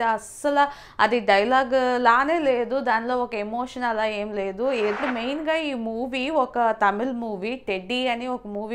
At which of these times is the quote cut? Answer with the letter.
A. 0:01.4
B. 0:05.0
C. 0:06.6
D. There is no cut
B